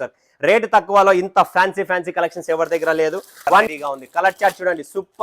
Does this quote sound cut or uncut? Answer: cut